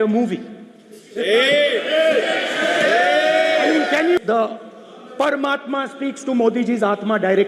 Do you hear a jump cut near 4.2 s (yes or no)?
yes